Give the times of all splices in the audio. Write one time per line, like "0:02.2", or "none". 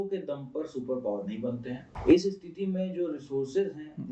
none